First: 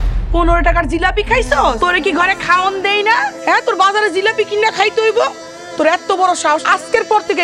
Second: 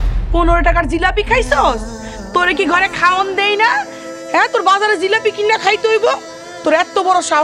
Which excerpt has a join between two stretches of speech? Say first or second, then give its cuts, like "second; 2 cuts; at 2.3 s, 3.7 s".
first; 3 cuts; at 1.8 s, 3.3 s, 6.6 s